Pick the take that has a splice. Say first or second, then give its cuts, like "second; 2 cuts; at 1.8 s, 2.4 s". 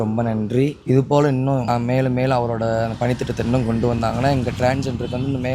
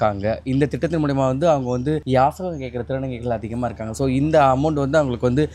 first; 1 cut; at 1.6 s